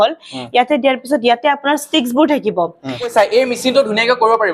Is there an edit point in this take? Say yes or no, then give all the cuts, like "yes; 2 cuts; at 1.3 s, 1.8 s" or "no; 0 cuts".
yes; 1 cut; at 3.1 s